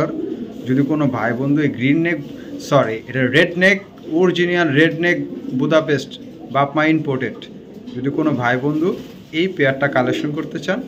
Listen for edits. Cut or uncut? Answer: uncut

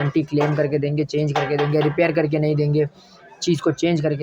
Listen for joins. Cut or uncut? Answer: uncut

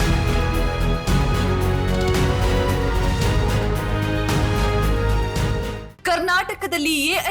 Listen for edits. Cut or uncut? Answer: uncut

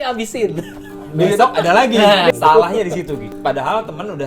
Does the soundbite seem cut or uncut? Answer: cut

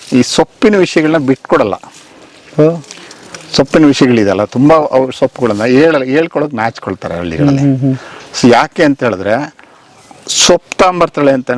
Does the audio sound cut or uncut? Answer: uncut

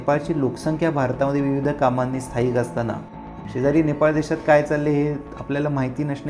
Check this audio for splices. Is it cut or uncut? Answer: uncut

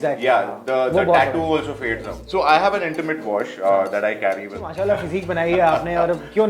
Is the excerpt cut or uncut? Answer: cut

